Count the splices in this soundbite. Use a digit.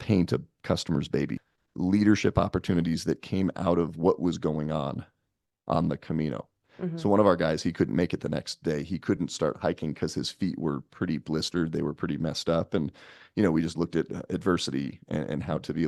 1